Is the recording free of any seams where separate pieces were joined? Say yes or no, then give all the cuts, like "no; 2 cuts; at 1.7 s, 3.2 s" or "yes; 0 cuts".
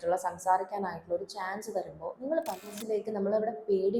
no; 1 cut; at 2.7 s